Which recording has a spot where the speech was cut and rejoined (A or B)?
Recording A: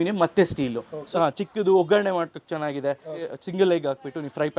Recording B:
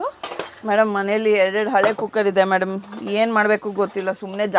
A